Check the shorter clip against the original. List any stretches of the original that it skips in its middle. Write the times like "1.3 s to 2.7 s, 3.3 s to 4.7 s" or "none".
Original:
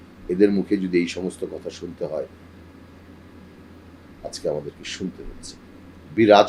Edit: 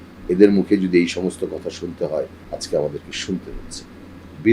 2.4 s to 4.1 s